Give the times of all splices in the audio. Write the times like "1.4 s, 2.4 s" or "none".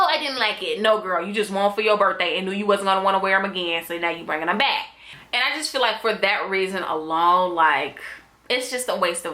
none